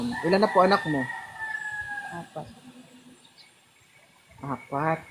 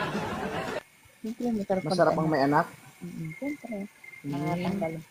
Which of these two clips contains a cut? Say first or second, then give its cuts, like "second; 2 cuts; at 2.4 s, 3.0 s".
second; 1 cut; at 1.0 s